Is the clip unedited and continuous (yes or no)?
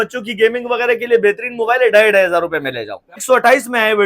no